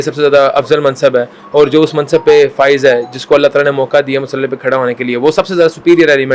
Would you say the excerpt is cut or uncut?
uncut